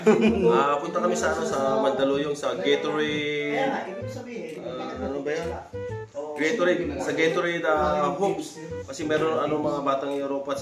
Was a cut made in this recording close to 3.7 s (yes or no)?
no